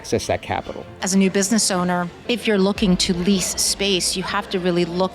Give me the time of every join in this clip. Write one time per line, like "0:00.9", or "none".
0:01.0
0:02.1